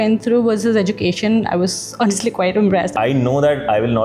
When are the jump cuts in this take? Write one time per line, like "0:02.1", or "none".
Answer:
0:02.9